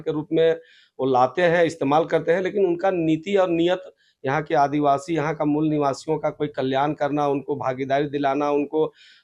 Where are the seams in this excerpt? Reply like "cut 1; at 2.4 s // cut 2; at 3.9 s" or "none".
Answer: none

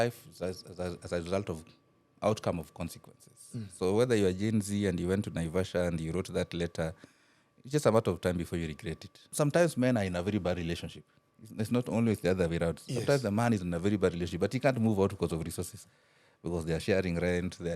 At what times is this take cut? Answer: cut 1; at 9.3 s

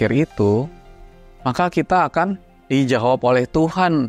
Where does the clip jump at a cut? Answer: cut 1; at 2.5 s

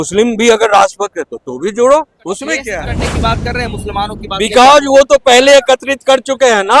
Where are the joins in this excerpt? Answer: cut 1; at 2.8 s

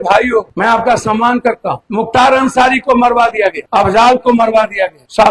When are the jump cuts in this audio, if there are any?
none

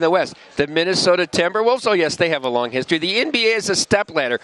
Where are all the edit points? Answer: none

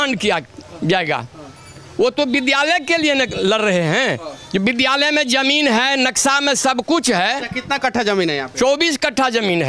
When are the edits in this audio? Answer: none

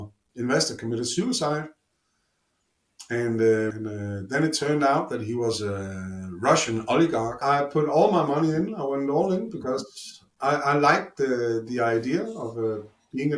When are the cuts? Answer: cut 1; at 3.7 s // cut 2; at 7.4 s

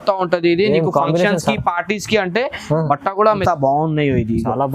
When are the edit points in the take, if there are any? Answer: cut 1; at 3.4 s

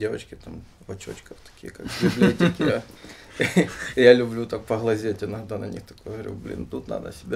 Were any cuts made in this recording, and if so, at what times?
none

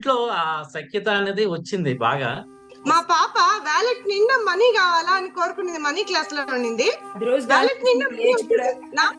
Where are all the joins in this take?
cut 1; at 2.7 s

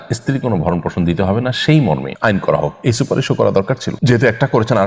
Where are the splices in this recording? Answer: cut 1; at 2.1 s // cut 2; at 3.9 s

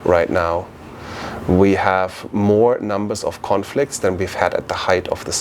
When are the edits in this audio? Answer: none

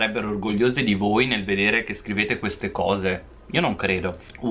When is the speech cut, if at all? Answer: none

